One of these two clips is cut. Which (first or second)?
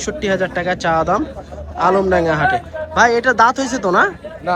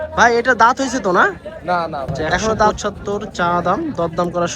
second